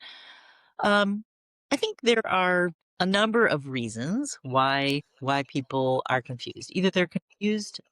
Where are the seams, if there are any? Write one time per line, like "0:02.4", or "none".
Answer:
0:02.8